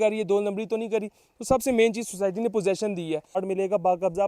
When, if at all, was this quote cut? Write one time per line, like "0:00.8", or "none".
0:03.4